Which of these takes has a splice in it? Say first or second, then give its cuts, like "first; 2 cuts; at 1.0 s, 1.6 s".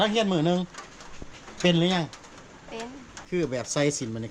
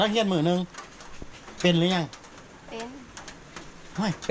first; 1 cut; at 3.1 s